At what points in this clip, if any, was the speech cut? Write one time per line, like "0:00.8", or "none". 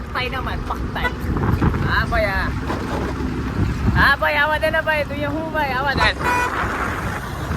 0:01.2